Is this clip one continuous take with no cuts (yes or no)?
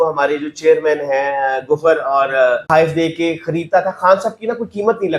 no